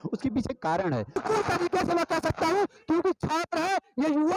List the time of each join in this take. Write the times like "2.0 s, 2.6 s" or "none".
1.1 s